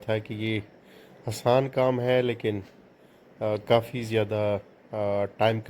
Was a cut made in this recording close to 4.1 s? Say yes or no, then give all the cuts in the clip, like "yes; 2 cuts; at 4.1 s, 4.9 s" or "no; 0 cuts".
no; 0 cuts